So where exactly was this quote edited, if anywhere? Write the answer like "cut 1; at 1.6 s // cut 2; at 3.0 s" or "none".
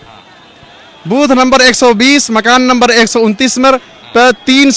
none